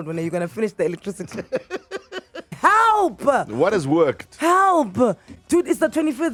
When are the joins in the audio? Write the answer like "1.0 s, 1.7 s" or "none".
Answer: none